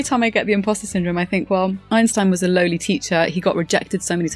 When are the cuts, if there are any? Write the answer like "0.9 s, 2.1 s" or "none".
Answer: 1.8 s

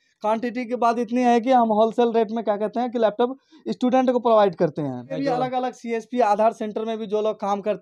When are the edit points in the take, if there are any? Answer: 5.1 s

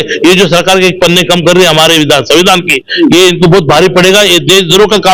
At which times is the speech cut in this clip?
none

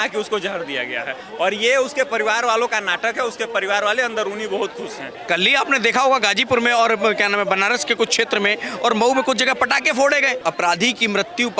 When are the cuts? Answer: 5.2 s, 10.4 s

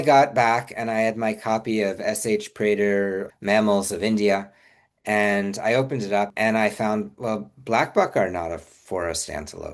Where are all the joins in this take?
3.3 s, 6.3 s

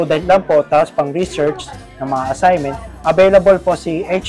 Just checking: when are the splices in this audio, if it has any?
none

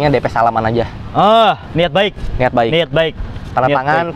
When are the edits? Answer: none

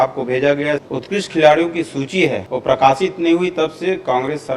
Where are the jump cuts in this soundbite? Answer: 0.8 s, 2.5 s

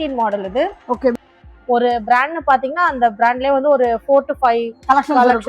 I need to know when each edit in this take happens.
1.1 s

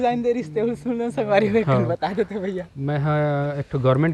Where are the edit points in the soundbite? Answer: none

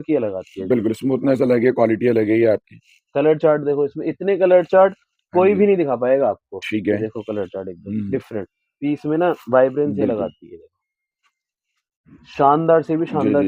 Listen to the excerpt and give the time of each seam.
none

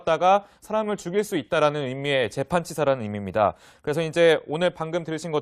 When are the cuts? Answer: 3.0 s

